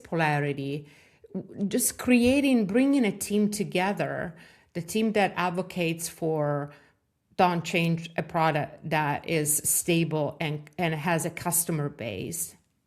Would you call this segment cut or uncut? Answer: uncut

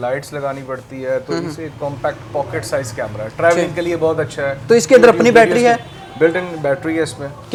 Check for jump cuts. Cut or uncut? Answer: uncut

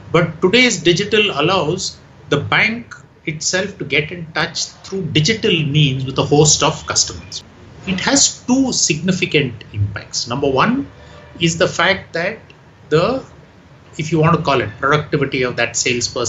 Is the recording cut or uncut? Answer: cut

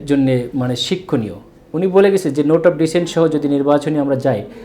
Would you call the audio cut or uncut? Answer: uncut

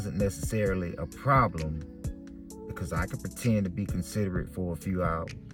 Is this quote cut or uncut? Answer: uncut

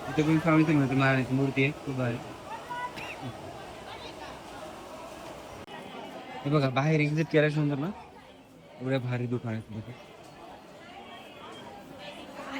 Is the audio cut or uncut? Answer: uncut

